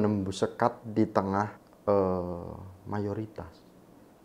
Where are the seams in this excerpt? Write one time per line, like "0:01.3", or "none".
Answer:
0:01.7